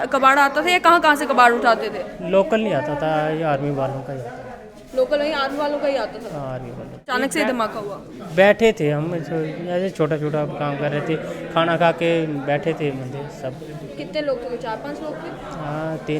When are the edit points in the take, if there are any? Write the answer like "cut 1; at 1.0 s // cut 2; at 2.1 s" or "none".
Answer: cut 1; at 7.1 s